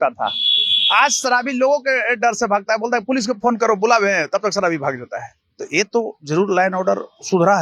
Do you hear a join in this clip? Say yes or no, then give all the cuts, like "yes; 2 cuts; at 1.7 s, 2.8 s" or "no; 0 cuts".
no; 0 cuts